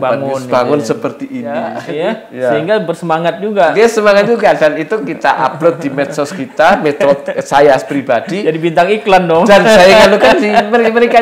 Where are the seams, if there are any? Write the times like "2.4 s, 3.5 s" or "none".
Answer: 1.8 s